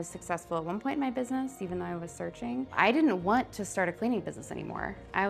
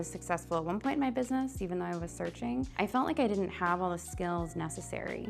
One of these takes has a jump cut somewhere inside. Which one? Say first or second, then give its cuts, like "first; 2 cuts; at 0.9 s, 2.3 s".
first; 1 cut; at 2.8 s